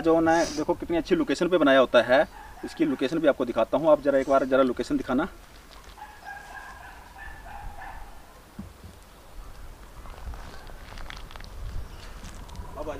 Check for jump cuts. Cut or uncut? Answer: uncut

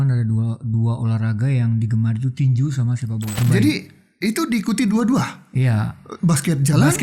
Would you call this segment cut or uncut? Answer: cut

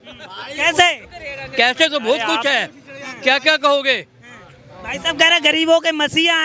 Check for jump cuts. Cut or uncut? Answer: uncut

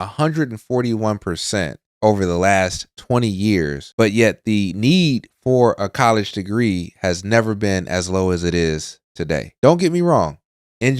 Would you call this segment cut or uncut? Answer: uncut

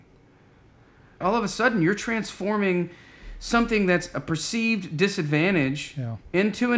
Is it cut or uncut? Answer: cut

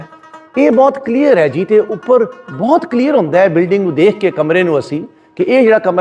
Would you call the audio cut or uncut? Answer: uncut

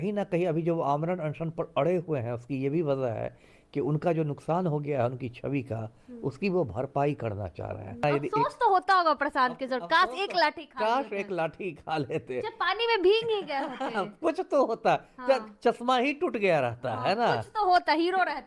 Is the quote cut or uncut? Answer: cut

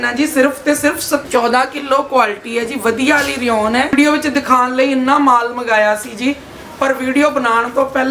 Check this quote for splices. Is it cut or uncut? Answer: cut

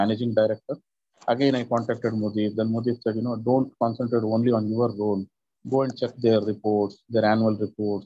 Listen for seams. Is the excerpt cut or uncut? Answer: uncut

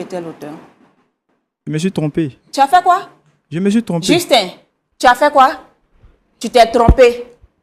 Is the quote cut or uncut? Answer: cut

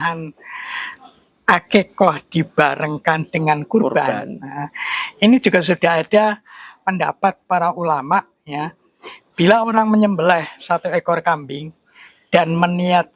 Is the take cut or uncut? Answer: uncut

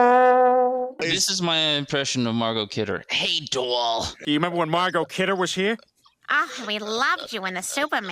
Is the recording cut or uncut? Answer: cut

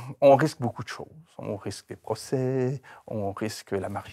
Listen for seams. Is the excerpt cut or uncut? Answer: uncut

